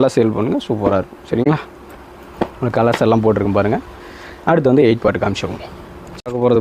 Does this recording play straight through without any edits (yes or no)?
yes